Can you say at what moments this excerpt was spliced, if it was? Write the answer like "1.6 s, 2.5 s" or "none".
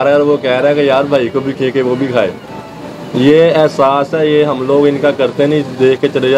none

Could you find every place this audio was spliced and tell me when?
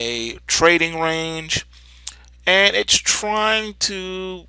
3.5 s

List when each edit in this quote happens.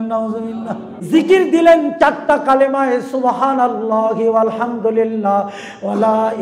0.9 s

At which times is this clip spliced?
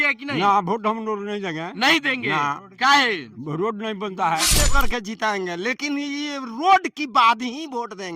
4.6 s

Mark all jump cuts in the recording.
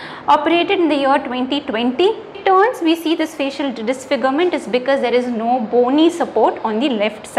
2.4 s

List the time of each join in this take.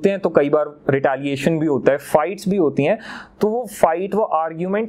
none

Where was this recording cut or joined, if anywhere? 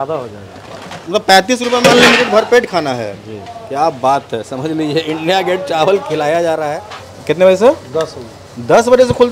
6.8 s

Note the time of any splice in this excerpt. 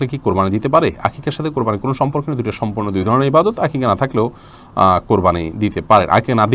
none

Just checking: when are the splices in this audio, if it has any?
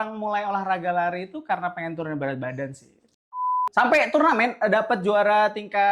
3.3 s

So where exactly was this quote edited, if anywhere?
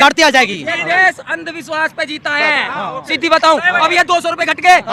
none

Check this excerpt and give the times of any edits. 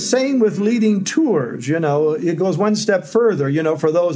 none

